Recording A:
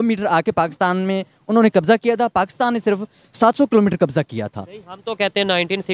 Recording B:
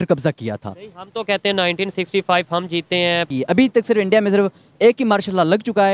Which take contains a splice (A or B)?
B